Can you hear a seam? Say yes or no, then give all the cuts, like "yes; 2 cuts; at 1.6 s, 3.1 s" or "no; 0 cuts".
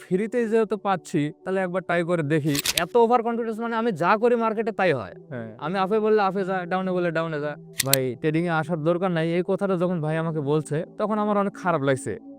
yes; 2 cuts; at 2.7 s, 7.7 s